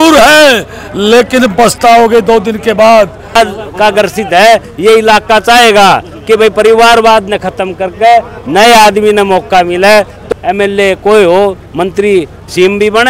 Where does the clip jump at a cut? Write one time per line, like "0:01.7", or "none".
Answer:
0:03.4
0:10.2